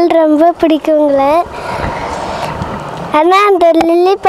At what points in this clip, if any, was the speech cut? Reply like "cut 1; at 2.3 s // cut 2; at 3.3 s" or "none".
none